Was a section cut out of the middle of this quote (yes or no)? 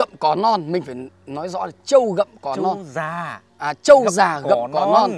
no